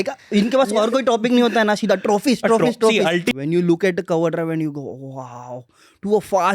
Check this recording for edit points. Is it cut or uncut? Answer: cut